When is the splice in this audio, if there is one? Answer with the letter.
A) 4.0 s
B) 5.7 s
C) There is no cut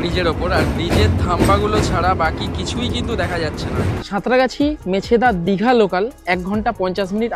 A